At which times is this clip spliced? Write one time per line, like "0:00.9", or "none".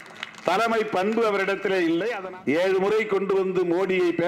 0:02.2